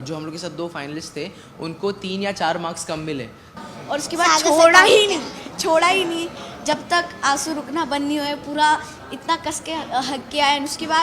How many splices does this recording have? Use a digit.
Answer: 1